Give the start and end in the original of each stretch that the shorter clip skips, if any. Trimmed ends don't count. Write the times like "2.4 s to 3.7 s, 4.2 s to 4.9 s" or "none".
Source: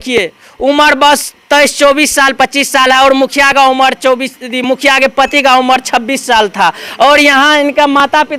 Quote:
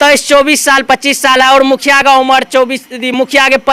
none